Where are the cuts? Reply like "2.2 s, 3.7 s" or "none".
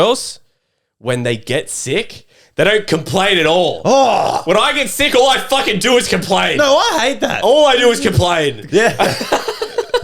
8.6 s